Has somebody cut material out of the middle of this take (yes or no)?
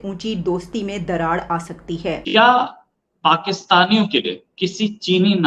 yes